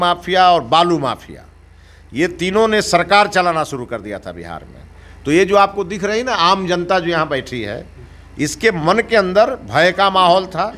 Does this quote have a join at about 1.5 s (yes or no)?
no